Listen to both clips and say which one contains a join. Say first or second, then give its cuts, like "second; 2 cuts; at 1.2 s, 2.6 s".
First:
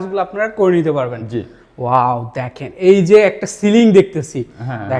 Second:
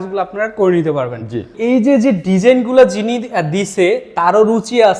second; 1 cut; at 1.5 s